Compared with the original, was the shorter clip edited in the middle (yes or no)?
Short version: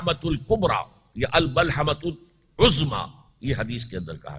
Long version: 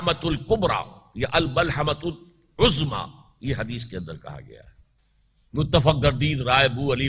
no